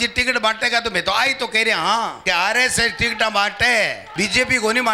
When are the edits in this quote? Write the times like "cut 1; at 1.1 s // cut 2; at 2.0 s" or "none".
cut 1; at 2.2 s // cut 2; at 4.0 s